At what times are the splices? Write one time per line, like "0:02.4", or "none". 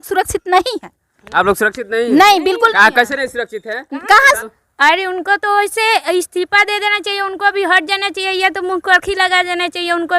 0:04.4

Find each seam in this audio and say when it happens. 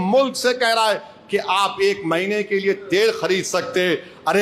none

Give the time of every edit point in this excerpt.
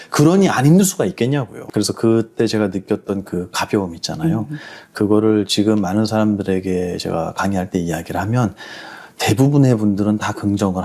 0:01.6

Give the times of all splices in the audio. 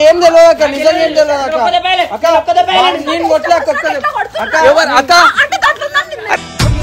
none

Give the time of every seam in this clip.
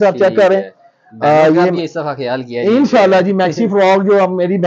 none

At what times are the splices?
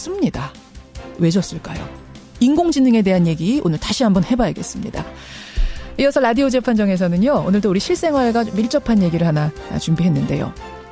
0:03.8

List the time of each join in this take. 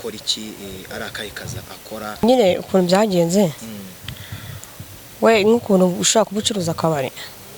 0:02.2

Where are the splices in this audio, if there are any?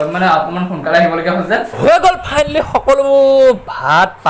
0:01.7

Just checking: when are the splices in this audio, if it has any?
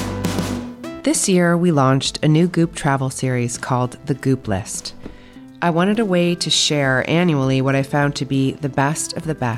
0:01.0

